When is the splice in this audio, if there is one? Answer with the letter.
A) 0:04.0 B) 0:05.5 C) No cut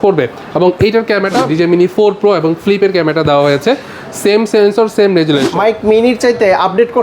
B